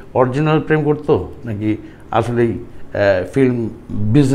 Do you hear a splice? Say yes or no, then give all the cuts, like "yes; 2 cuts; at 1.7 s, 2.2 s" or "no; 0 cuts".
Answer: no; 0 cuts